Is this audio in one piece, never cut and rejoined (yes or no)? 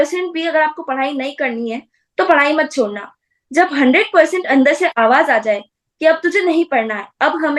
yes